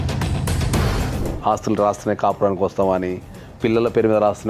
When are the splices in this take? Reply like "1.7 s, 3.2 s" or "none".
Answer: 1.1 s